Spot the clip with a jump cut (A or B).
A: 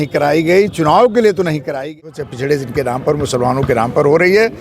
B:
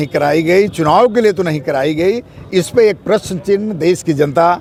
A